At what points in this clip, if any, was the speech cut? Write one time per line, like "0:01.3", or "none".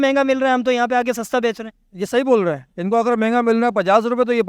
none